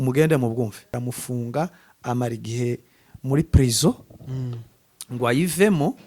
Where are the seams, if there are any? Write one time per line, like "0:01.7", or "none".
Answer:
0:01.0